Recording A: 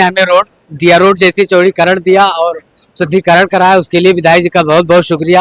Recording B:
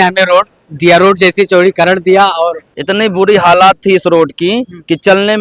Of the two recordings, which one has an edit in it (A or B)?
B